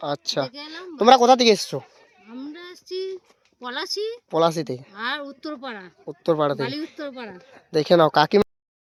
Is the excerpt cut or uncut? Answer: uncut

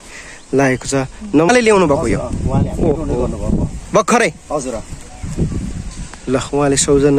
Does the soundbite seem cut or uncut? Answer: cut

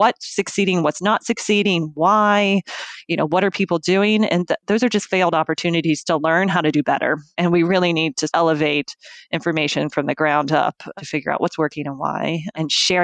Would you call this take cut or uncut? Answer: cut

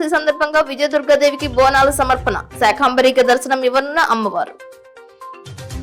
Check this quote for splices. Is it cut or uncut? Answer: uncut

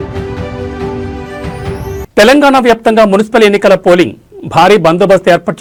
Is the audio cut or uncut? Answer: uncut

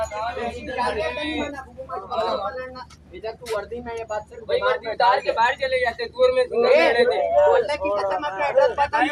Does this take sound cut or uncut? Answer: uncut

